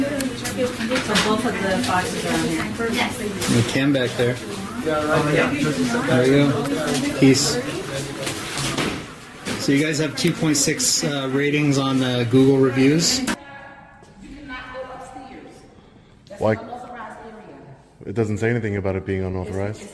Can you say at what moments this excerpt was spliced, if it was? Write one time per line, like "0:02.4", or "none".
0:13.4